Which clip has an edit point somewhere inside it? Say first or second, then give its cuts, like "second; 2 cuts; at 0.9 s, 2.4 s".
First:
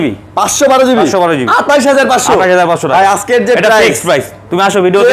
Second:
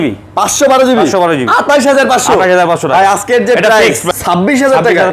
second; 1 cut; at 4.0 s